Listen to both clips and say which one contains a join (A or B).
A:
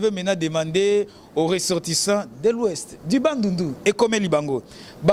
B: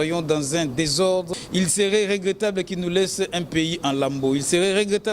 B